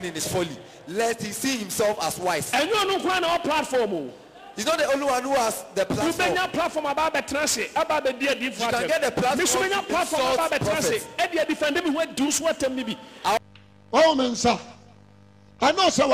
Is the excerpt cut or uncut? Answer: cut